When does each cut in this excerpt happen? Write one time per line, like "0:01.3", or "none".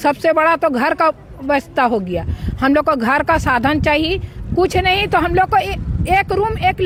none

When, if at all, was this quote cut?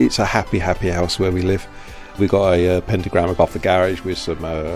0:02.2
0:03.3

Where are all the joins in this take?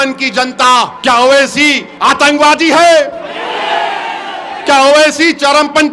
0:00.9
0:01.9

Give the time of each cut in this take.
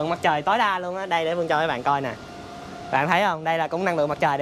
none

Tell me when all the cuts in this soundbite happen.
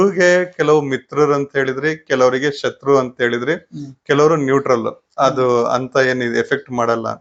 none

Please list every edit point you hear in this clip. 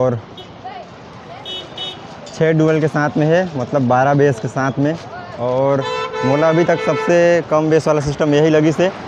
none

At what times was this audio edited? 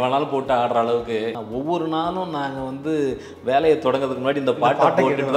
0:01.3

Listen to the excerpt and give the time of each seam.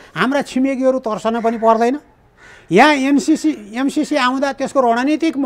none

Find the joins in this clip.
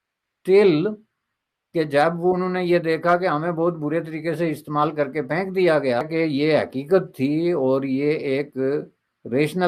0:06.1

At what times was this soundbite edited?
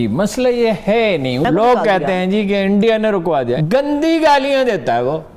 0:01.4
0:03.6

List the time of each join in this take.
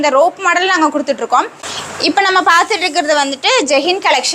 0:01.6

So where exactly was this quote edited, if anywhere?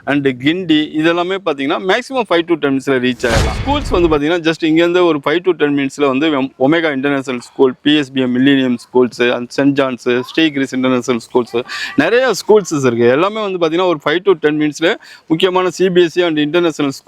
0:03.6

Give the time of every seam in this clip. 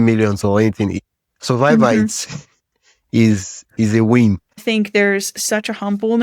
0:04.5

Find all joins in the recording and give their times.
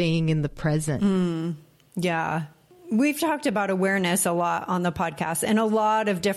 none

